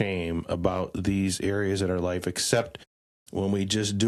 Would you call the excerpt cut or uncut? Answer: uncut